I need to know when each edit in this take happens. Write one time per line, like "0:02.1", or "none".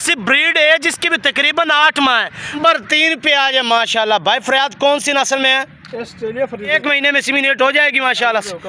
0:02.6
0:06.7